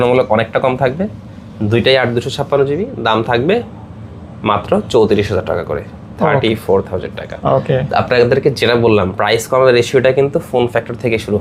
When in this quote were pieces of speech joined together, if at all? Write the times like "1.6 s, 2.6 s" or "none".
none